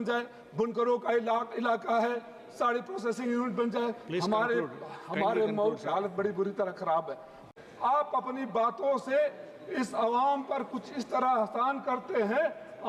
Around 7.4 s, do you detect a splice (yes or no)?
yes